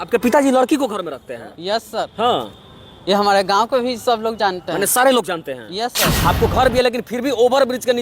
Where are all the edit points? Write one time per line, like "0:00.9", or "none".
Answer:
0:06.1